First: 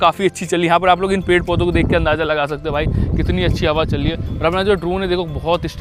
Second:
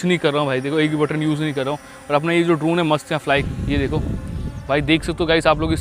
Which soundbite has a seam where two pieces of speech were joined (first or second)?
second